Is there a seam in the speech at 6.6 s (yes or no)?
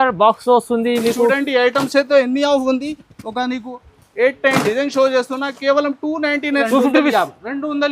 yes